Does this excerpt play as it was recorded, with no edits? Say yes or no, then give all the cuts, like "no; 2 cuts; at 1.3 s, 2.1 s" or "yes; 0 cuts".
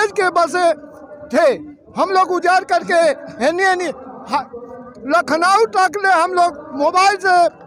yes; 0 cuts